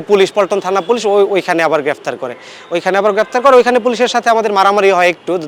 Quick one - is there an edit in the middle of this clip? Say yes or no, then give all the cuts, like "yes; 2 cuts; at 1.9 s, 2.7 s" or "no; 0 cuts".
no; 0 cuts